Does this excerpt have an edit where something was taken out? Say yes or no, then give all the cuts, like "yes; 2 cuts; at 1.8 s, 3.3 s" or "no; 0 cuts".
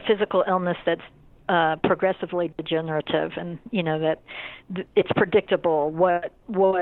no; 0 cuts